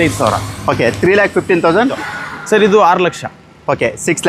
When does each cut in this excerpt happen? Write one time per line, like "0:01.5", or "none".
0:01.9